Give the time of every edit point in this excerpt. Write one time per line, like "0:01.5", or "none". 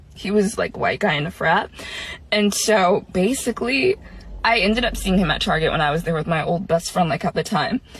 none